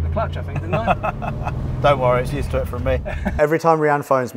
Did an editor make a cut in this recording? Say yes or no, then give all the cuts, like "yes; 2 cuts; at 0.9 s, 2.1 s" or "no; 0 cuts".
yes; 1 cut; at 3.3 s